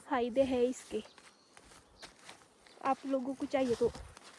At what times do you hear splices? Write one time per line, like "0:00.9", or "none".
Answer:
none